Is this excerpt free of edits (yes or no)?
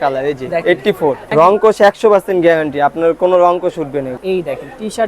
no